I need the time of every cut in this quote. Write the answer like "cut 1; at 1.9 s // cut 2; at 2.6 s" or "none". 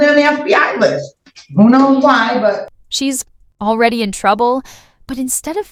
none